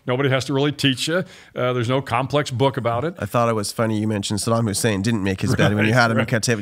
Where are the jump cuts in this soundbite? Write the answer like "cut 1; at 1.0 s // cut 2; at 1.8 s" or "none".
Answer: cut 1; at 3.2 s

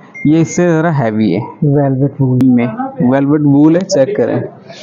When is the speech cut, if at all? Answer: cut 1; at 2.4 s

